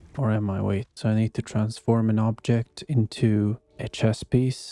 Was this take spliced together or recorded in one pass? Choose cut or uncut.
cut